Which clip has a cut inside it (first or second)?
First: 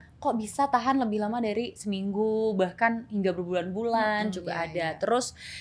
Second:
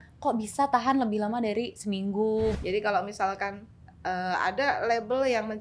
second